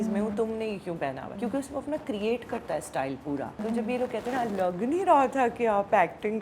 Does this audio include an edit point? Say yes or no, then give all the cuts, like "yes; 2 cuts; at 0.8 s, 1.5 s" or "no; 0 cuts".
yes; 2 cuts; at 1.4 s, 3.6 s